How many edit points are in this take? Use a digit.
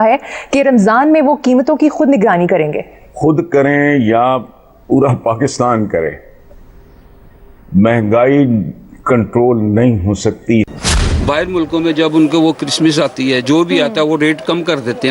1